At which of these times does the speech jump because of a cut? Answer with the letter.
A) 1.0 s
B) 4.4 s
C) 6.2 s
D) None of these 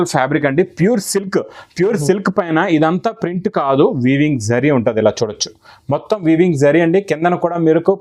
D